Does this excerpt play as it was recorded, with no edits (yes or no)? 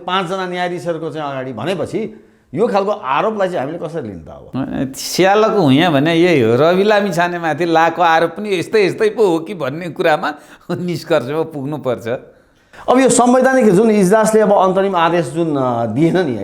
yes